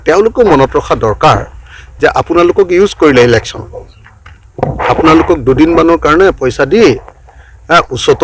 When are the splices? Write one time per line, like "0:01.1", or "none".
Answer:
none